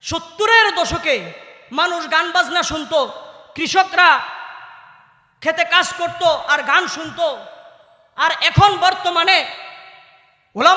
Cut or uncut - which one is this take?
uncut